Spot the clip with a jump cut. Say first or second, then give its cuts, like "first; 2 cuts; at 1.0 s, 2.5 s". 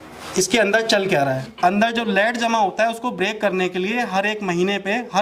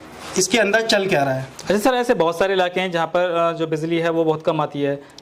first; 1 cut; at 1.5 s